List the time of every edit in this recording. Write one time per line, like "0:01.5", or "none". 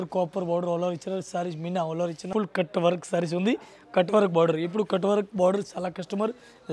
0:02.3